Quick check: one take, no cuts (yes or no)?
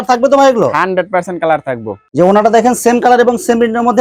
yes